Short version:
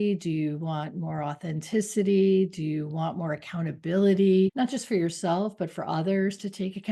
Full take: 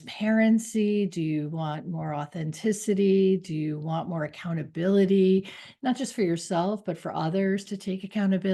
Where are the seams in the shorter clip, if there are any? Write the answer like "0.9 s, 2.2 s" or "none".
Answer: 4.5 s